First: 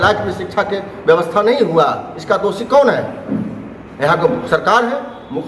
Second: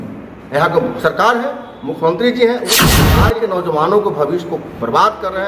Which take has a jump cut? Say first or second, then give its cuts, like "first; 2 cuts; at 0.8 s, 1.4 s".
second; 1 cut; at 3.0 s